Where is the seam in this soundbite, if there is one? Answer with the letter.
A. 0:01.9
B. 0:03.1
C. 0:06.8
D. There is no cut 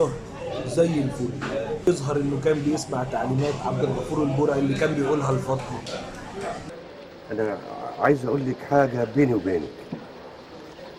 A